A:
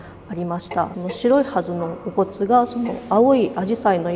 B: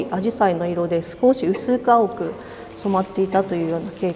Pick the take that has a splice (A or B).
A